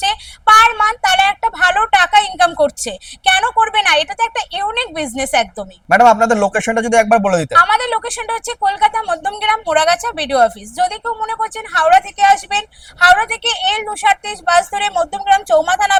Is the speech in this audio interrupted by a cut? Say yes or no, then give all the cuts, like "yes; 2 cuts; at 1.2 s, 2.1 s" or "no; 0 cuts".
no; 0 cuts